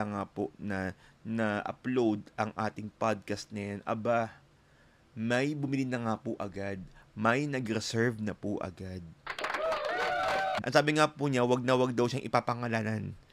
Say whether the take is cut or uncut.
cut